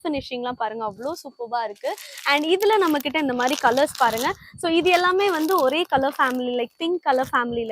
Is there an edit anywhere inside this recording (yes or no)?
no